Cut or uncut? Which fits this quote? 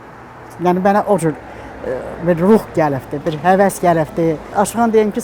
uncut